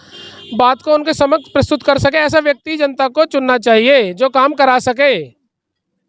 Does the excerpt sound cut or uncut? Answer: uncut